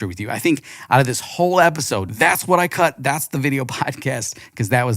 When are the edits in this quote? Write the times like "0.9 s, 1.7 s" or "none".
2.0 s